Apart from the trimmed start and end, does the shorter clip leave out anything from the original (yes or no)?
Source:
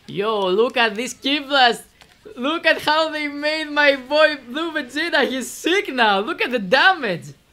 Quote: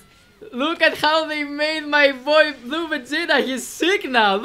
no